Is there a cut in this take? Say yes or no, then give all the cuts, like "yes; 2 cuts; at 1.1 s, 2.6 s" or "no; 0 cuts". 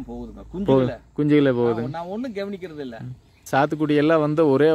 yes; 1 cut; at 3.4 s